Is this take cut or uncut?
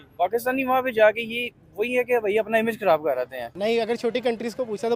cut